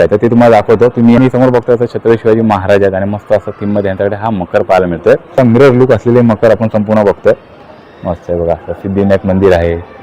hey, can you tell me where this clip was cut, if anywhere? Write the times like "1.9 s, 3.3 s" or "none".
1.2 s, 5.4 s